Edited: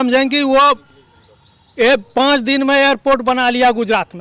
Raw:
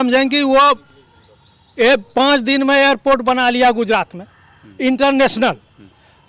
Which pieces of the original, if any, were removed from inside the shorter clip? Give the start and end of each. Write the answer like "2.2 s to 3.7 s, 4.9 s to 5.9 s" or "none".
none